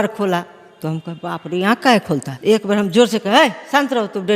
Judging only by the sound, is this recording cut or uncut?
cut